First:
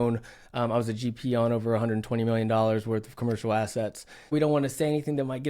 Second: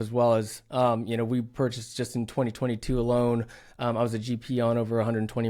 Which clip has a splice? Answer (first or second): first